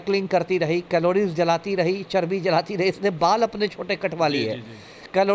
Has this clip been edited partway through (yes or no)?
no